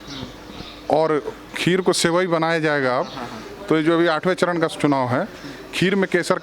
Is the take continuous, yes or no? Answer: no